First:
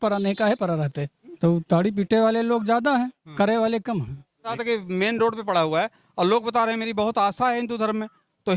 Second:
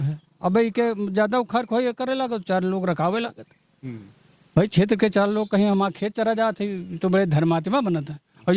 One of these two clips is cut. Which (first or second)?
first